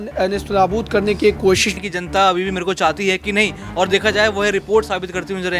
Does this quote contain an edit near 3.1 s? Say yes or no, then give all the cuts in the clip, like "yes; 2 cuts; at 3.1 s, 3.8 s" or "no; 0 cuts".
no; 1 cut; at 1.7 s